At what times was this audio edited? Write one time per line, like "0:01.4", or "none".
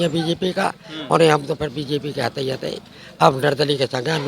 none